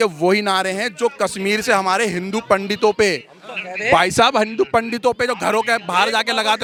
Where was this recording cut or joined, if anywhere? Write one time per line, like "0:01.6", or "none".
none